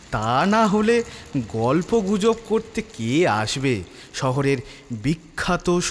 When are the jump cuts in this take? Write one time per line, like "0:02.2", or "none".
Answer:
none